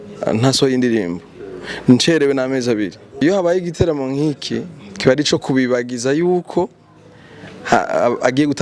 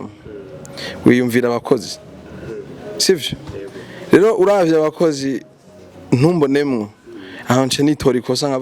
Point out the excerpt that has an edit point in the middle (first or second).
first